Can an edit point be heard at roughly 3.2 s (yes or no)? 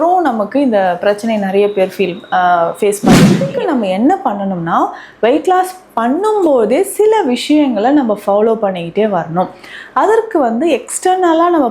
yes